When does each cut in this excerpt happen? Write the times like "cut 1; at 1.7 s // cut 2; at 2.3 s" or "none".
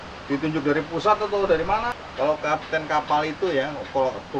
cut 1; at 1.9 s